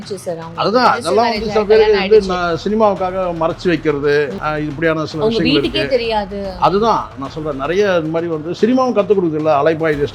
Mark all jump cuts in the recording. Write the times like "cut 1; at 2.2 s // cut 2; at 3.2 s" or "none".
cut 1; at 4.4 s